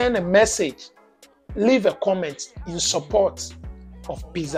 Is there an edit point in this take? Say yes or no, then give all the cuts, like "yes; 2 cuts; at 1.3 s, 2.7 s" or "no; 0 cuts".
no; 0 cuts